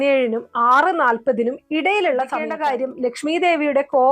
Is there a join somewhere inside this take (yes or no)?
yes